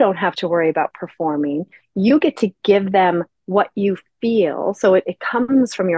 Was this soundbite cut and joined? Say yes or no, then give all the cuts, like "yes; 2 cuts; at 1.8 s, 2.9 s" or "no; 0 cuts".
no; 0 cuts